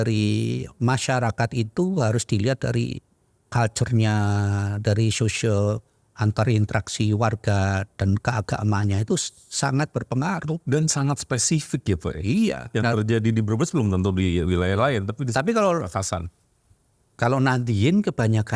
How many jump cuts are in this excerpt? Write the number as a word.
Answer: zero